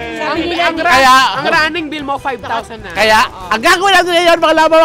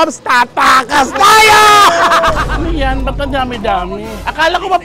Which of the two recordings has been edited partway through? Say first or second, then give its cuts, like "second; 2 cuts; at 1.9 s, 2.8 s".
second; 1 cut; at 2.5 s